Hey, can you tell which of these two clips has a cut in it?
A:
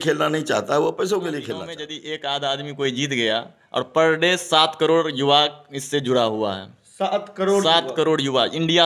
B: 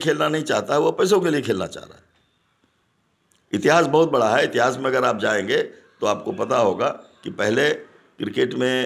A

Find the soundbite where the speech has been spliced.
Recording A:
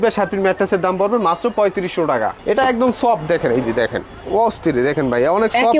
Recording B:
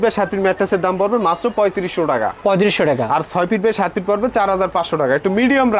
A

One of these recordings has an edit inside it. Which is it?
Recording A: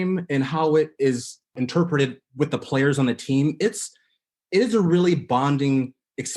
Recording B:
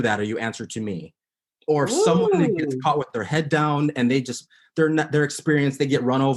A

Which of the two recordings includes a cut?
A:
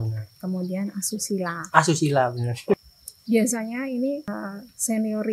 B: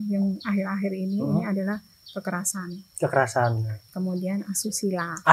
A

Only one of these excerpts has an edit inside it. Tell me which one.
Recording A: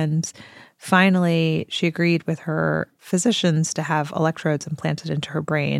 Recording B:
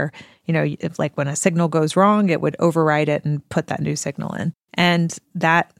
B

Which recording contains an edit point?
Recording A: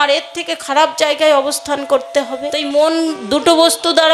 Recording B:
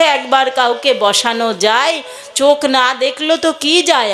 A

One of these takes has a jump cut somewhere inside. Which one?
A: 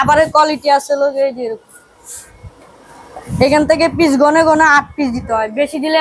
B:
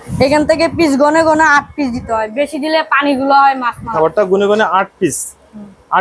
B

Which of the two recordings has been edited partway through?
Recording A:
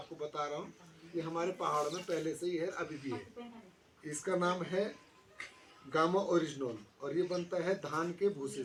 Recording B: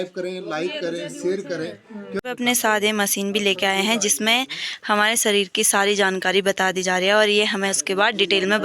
B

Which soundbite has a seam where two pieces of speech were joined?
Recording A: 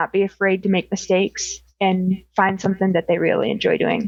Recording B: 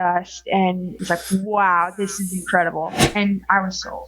B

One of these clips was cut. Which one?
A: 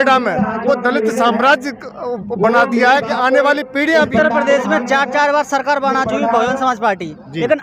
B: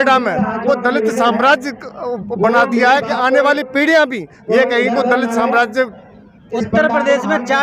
A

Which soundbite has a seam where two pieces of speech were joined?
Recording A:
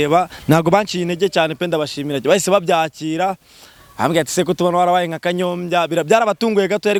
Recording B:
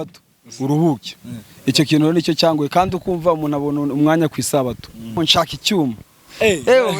B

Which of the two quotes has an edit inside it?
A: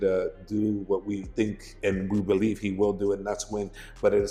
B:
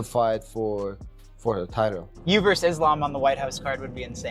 B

